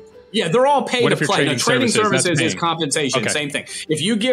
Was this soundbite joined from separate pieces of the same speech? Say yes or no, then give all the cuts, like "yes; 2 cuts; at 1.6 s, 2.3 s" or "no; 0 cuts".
no; 0 cuts